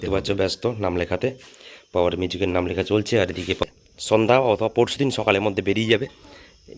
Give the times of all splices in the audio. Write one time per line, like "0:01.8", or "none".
0:03.6